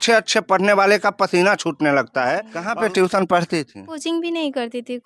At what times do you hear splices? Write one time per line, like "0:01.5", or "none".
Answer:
0:02.6
0:04.0